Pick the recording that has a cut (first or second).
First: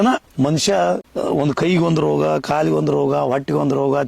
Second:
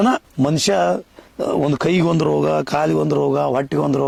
first